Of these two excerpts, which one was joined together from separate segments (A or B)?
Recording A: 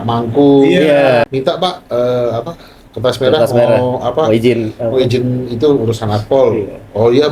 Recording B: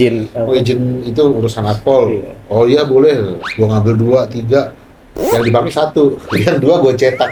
A